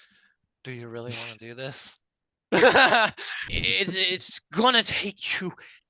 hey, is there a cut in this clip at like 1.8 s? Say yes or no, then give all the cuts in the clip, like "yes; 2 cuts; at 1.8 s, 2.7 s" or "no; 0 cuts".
no; 1 cut; at 3.5 s